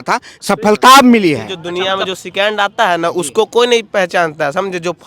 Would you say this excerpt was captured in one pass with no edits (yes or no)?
no